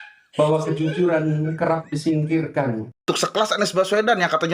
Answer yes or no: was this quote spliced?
yes